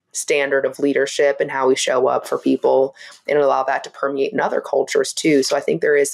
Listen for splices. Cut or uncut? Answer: uncut